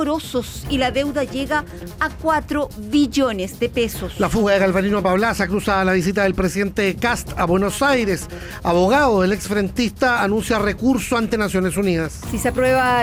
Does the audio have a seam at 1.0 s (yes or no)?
no